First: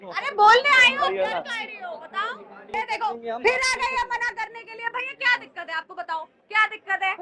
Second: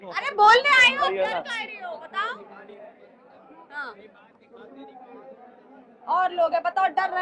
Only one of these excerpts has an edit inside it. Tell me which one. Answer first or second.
first